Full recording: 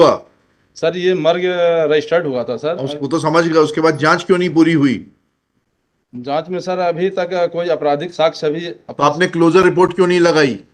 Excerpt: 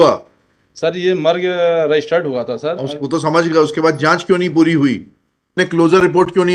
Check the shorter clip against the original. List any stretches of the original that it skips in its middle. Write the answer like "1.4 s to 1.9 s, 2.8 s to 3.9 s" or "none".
5.5 s to 9.2 s